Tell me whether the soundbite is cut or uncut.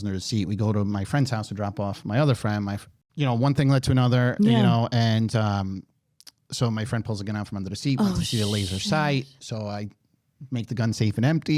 cut